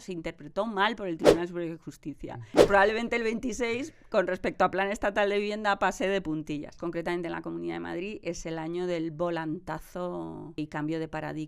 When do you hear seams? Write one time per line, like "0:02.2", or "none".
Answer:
0:02.6
0:06.7
0:10.6